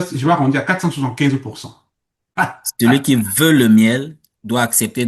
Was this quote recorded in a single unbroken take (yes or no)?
no